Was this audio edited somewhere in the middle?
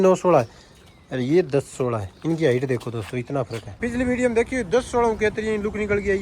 yes; 1 cut; at 3.8 s

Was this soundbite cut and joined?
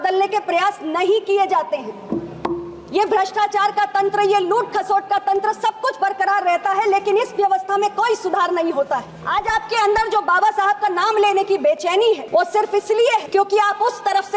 yes; 3 cuts; at 9.2 s, 12.2 s, 13.3 s

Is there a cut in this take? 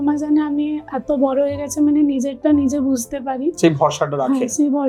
no; 0 cuts

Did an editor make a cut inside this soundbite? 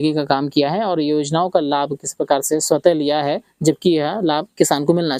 no; 0 cuts

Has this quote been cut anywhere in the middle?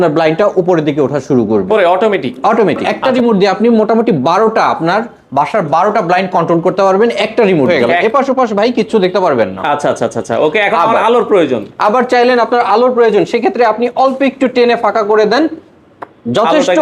yes; 2 cuts; at 3.0 s, 7.7 s

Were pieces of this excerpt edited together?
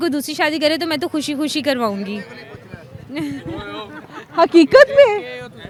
no; 0 cuts

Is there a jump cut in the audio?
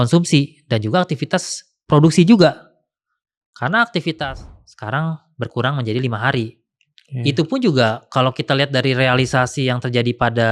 yes; 1 cut; at 4.3 s

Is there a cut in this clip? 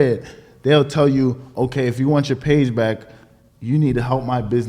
no; 0 cuts

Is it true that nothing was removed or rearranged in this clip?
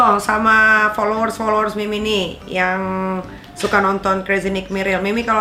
yes; 0 cuts

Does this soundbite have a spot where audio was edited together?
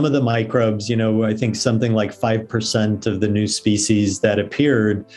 no; 0 cuts

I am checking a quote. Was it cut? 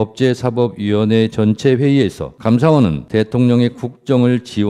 yes; 2 cuts; at 2.3 s, 3.0 s

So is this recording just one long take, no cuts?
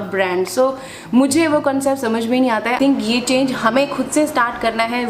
no; 1 cut; at 2.8 s

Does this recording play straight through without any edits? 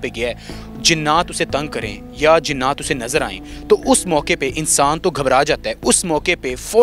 yes; 0 cuts

